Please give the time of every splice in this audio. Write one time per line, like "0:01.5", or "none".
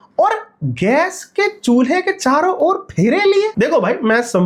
none